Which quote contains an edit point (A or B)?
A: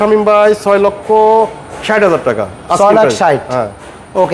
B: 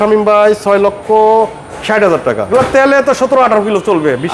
B